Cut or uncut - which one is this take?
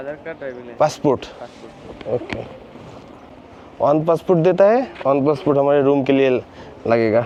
uncut